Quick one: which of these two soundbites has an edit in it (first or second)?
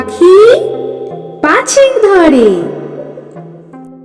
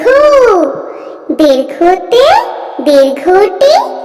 first